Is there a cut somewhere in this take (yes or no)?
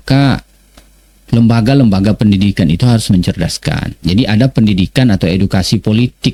no